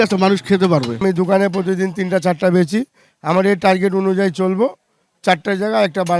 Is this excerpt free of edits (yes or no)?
no